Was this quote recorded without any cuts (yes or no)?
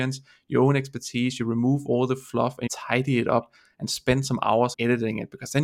no